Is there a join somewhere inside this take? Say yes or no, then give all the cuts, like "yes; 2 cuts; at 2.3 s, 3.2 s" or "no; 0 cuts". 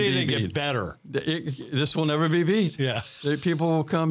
no; 0 cuts